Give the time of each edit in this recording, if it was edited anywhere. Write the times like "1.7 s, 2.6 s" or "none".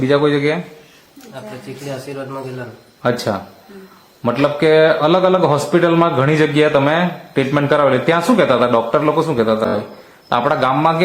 9.7 s

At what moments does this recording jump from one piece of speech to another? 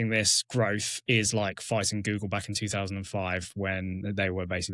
none

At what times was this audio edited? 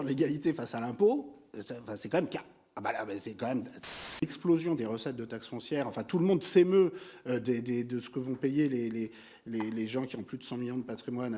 4.2 s

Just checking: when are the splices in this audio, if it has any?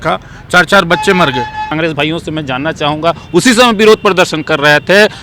1.7 s

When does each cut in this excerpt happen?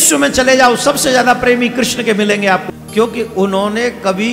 2.7 s

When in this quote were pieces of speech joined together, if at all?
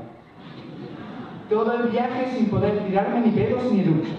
none

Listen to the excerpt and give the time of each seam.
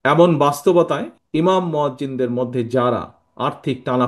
1.2 s

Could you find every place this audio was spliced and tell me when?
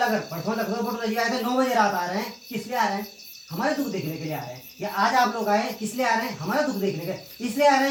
none

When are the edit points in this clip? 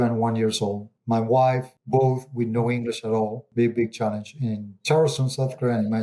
0.9 s, 1.7 s, 3.4 s

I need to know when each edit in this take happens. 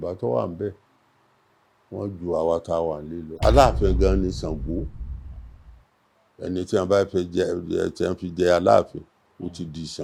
3.2 s

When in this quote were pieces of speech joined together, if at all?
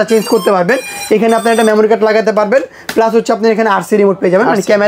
none

